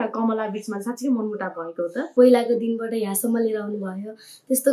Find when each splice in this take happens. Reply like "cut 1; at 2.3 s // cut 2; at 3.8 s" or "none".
cut 1; at 2.1 s